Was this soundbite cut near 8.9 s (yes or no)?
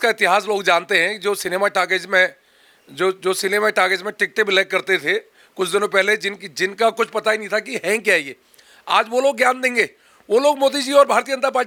no